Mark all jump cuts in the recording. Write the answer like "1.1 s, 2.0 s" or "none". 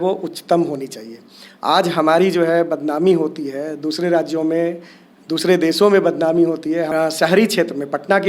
6.9 s